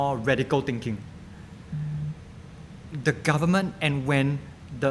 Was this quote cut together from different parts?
no; 0 cuts

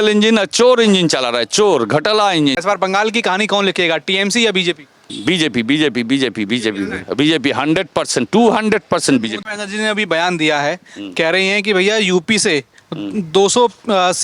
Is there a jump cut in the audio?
yes; 2 cuts; at 2.6 s, 9.4 s

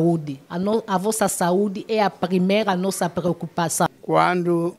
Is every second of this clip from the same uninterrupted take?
no; 1 cut; at 3.9 s

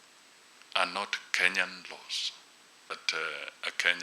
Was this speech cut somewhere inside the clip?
yes; 1 cut; at 2.9 s

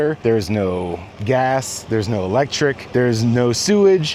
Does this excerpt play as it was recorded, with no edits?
yes; 0 cuts

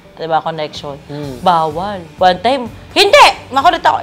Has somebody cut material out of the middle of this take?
yes; 1 cut; at 2.0 s

